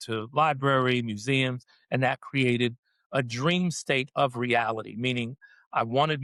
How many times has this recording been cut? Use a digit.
0